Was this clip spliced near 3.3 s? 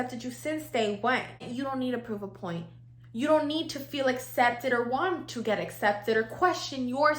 no; 1 cut; at 1.5 s

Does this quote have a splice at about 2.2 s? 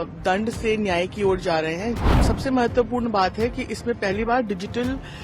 yes; 1 cut; at 2.2 s

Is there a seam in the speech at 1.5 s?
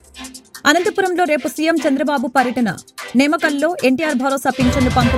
no; 0 cuts

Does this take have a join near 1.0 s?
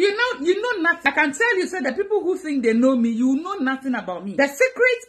yes; 2 cuts; at 1.0 s, 4.2 s

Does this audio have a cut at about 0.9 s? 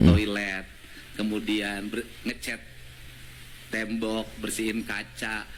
no; 0 cuts

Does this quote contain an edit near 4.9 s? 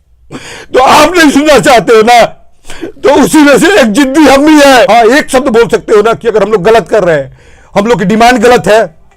yes; 1 cut; at 4.9 s

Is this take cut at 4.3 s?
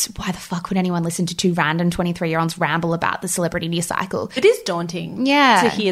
yes; 1 cut; at 4.3 s

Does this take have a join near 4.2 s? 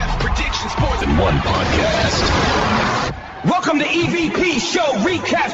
no; 1 cut; at 1.0 s

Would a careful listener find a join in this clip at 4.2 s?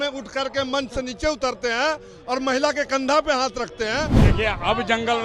yes; 1 cut; at 4.2 s

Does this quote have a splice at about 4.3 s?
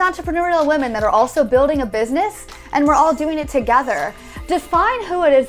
yes; 2 cuts; at 2.6 s, 4.3 s

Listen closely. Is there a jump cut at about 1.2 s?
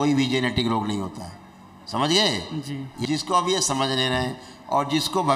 no; 1 cut; at 2.9 s

